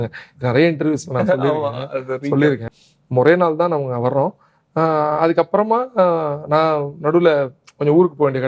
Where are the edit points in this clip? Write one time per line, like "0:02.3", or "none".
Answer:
0:02.7